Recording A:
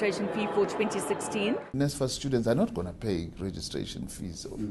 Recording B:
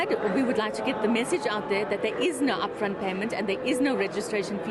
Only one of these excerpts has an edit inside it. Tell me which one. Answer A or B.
A